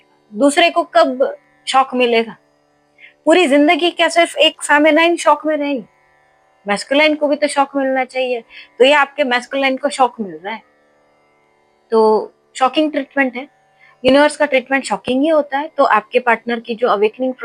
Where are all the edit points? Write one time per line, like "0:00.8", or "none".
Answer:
none